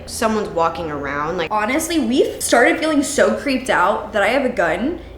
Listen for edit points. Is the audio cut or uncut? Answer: cut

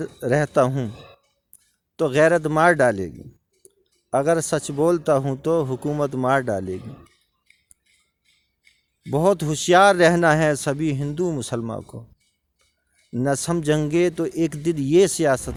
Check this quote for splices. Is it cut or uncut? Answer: uncut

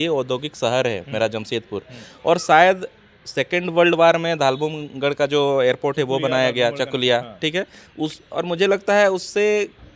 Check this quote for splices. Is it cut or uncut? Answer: uncut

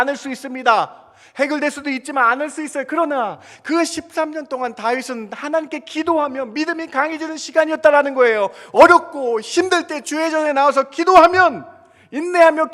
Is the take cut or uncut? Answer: uncut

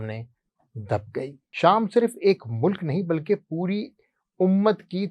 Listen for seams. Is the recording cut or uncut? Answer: cut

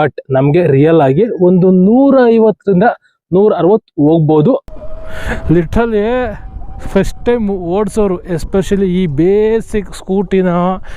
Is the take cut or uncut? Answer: cut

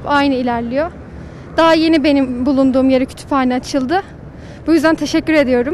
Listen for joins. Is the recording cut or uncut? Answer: uncut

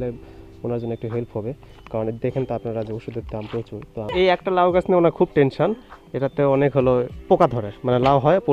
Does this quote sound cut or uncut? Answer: cut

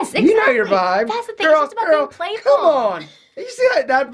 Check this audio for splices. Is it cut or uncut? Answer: uncut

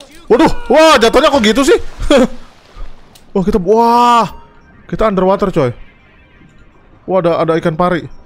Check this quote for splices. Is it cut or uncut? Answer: uncut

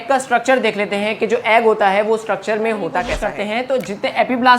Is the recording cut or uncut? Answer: cut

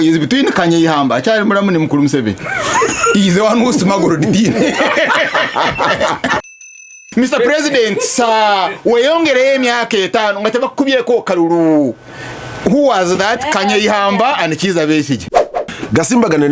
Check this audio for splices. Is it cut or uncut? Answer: cut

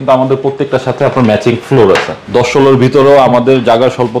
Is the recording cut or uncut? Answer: cut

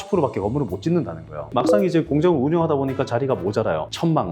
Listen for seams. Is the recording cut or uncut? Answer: cut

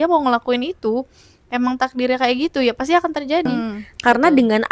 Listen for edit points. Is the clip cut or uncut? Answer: cut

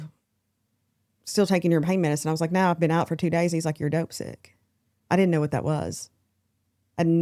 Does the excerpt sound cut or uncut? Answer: uncut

